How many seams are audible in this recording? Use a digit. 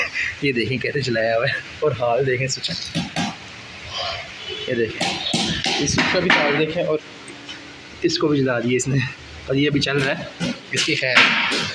0